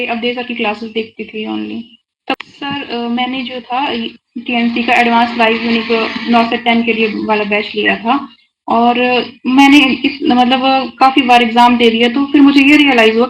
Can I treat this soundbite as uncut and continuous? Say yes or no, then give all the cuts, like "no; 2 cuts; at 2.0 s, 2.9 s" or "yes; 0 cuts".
no; 1 cut; at 2.3 s